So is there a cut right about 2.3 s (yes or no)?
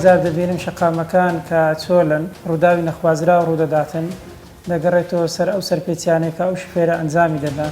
yes